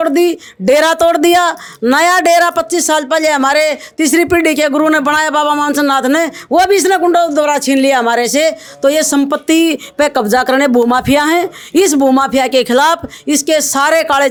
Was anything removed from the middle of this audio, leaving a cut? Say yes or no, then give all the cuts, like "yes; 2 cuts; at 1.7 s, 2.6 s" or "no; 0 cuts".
no; 0 cuts